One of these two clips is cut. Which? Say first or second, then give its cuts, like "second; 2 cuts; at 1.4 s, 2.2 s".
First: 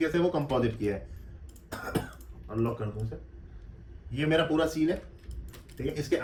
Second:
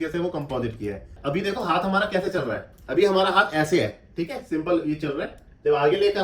second; 1 cut; at 1.2 s